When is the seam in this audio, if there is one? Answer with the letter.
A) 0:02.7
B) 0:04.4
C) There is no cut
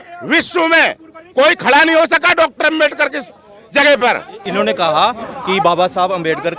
B